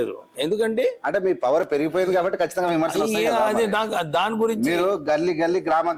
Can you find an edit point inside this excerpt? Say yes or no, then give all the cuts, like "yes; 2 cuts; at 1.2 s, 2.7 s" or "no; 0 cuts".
no; 0 cuts